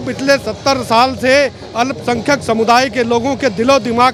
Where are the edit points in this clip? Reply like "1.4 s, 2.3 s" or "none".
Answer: none